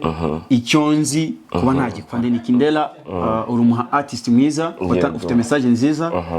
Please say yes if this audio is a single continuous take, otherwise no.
no